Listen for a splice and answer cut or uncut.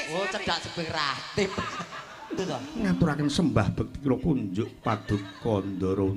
cut